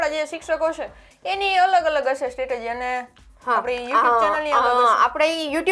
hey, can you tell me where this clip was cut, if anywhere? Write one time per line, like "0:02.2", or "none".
none